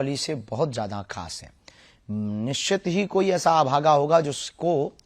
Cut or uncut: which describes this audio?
uncut